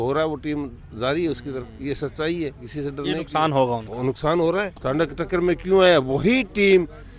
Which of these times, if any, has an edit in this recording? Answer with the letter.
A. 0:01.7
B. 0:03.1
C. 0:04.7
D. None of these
C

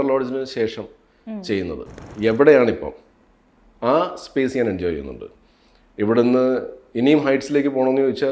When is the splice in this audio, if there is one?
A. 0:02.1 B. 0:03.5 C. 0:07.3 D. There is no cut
A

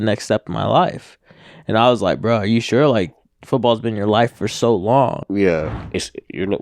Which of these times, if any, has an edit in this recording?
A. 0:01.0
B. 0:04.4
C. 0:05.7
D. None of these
C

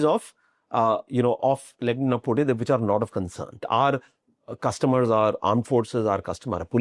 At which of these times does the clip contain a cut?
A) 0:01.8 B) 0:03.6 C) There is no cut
B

